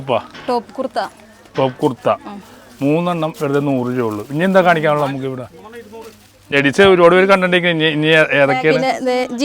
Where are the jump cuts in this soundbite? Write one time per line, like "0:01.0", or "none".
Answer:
0:06.5